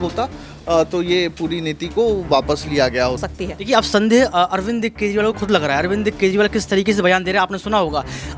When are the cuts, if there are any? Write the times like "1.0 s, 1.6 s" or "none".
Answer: 3.2 s